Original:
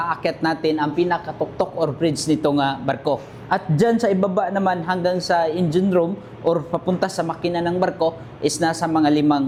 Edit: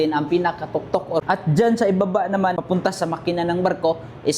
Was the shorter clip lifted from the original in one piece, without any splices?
no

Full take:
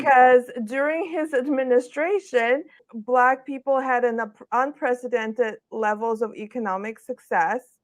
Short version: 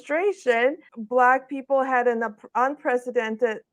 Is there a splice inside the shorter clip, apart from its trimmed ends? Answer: yes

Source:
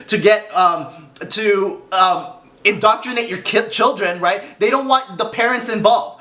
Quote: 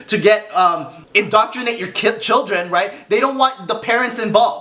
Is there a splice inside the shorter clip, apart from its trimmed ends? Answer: yes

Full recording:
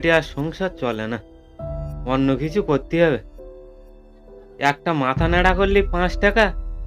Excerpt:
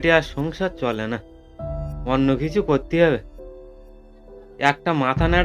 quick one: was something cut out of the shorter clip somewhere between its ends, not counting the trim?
no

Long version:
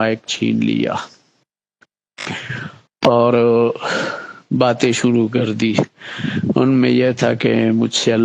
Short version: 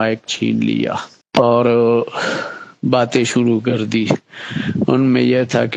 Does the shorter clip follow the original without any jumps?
no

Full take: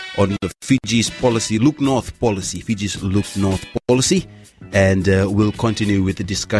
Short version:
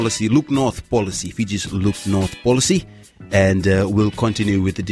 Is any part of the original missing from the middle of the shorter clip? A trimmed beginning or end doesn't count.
yes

